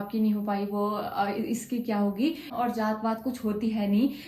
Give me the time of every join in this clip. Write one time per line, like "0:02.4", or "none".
0:02.5

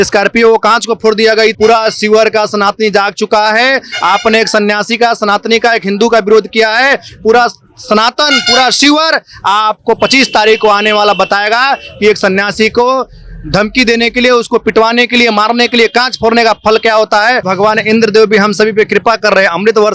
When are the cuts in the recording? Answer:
0:01.5
0:17.5

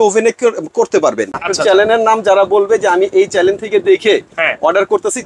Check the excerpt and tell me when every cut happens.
0:01.4

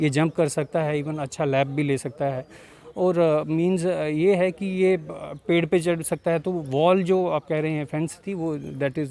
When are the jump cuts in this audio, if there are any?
none

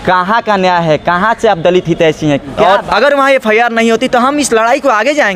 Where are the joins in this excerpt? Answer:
0:02.6

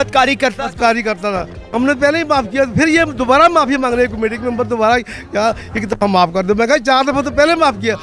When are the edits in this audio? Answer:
none

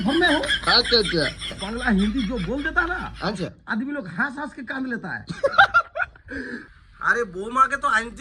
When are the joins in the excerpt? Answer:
0:01.5
0:06.6

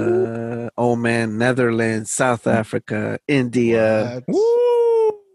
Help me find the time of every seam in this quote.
none

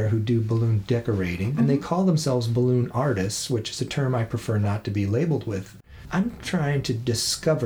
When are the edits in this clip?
0:01.5
0:05.8

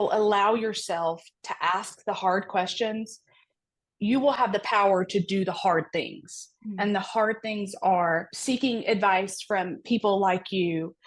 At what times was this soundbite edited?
0:08.3

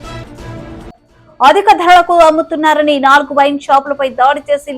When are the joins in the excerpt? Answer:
0:00.9

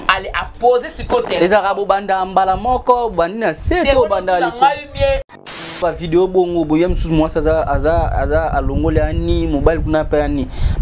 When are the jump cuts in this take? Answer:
0:05.5

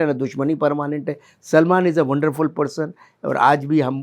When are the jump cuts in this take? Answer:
none

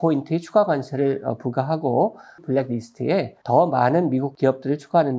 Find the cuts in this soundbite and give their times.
0:02.4
0:03.4
0:04.3

